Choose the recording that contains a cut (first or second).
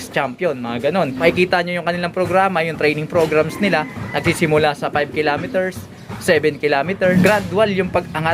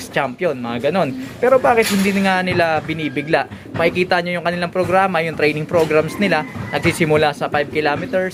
first